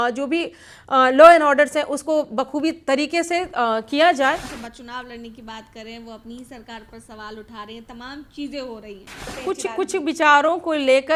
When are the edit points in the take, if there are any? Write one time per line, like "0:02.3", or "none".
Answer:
0:04.5
0:09.3